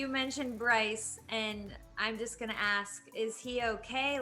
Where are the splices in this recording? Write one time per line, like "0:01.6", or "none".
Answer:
none